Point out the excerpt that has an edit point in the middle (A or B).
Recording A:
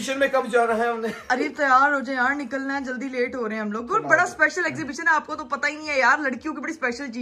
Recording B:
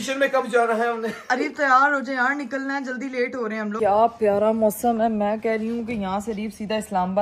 B